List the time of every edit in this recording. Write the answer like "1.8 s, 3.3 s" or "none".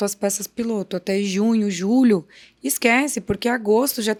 none